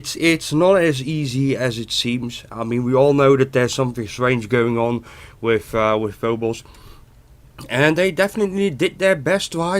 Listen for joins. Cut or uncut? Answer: cut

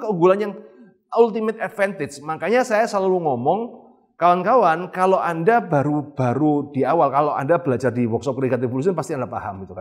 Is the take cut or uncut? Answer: uncut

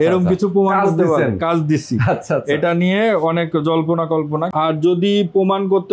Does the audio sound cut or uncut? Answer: cut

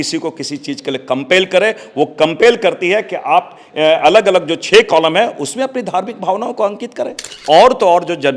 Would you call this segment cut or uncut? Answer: cut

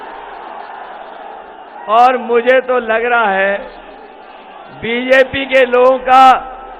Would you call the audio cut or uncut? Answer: uncut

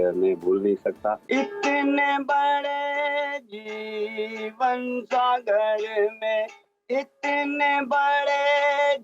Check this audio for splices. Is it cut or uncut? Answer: cut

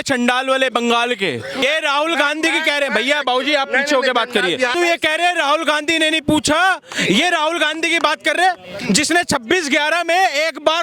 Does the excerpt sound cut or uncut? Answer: cut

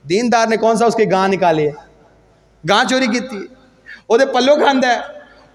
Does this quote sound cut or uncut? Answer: uncut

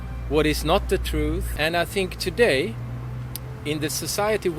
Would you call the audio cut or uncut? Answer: cut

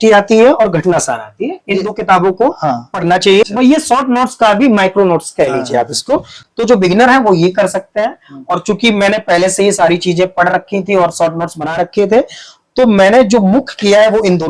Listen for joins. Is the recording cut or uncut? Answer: cut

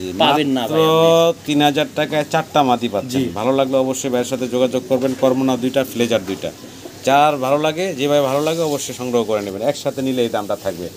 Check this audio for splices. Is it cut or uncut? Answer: uncut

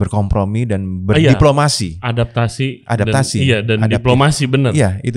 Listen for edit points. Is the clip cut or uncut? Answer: uncut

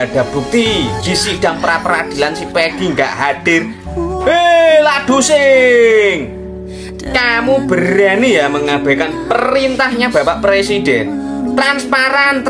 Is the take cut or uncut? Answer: uncut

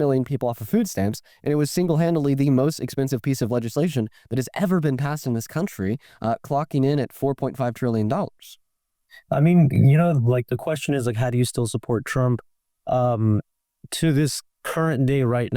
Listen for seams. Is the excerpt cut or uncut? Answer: uncut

